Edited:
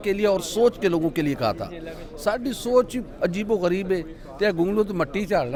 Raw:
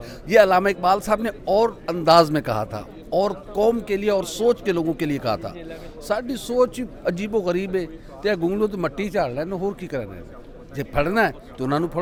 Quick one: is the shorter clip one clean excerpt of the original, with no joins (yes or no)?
yes